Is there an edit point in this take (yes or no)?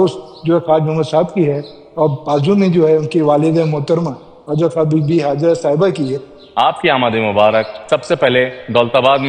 yes